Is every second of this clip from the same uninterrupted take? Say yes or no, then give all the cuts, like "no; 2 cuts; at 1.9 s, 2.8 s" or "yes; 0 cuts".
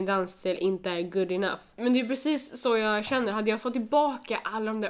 no; 1 cut; at 1.6 s